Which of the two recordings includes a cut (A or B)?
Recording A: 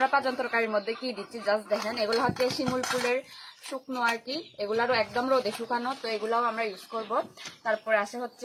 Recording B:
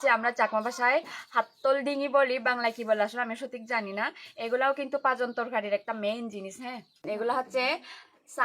B